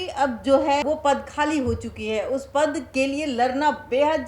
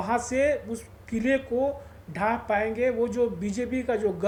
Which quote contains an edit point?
first; 2 cuts; at 0.8 s, 2.8 s

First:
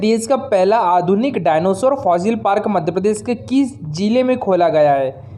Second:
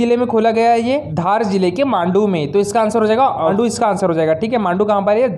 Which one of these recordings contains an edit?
second; 2 cuts; at 1.1 s, 3.5 s

